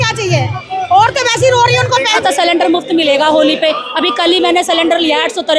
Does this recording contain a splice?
yes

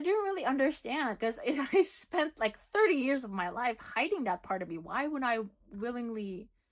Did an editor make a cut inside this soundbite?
yes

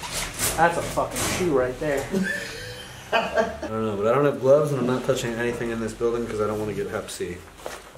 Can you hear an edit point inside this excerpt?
yes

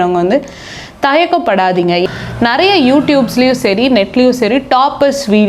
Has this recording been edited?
yes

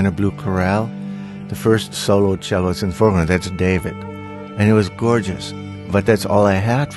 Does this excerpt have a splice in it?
no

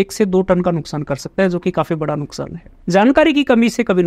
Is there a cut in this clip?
yes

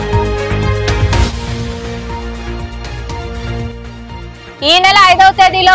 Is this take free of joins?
no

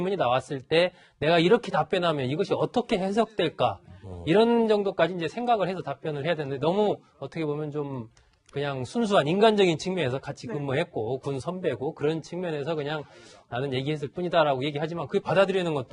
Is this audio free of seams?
no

